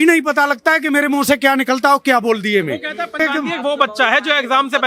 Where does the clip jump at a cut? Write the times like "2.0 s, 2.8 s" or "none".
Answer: 3.2 s